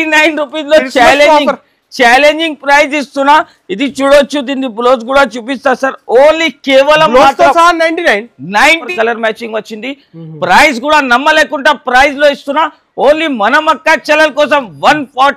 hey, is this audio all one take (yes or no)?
no